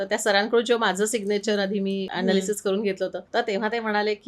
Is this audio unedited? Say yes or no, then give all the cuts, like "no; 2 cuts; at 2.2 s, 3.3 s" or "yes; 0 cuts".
no; 2 cuts; at 2.1 s, 3.2 s